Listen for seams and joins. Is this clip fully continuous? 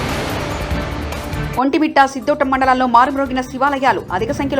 no; 1 cut; at 1.4 s

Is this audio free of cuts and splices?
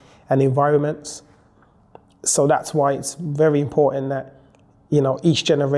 yes; 0 cuts

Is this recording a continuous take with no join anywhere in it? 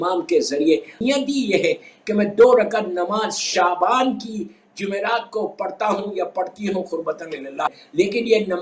no; 2 cuts; at 0.9 s, 7.8 s

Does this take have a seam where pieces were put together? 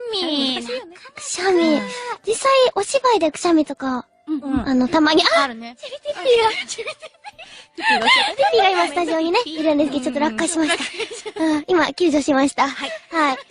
yes; 1 cut; at 3.3 s

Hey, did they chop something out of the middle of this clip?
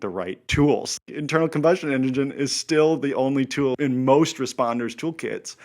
yes; 2 cuts; at 1.0 s, 3.7 s

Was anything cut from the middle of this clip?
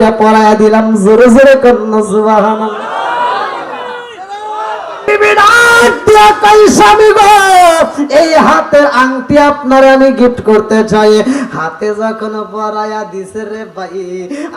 yes; 1 cut; at 5.1 s

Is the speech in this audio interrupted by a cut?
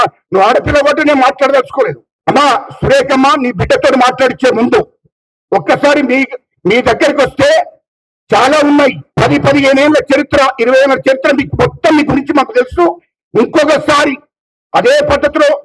no; 0 cuts

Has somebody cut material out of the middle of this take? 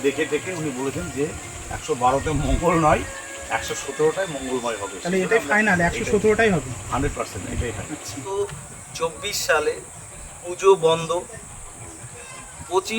yes; 1 cut; at 8.3 s

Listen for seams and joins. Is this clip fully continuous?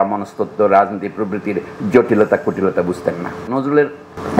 no; 1 cut; at 3.4 s

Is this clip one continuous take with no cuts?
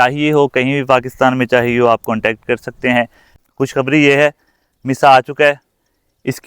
no; 1 cut; at 3.3 s

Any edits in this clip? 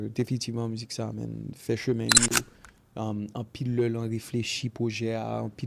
yes; 1 cut; at 2.3 s

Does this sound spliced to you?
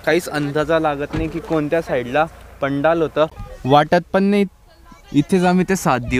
yes; 1 cut; at 3.4 s

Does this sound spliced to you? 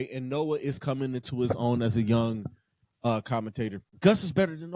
yes; 1 cut; at 3.9 s

